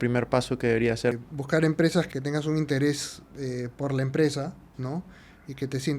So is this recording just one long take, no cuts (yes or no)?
no